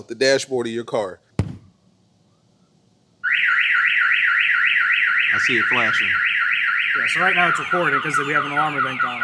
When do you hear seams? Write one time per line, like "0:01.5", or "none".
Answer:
0:01.2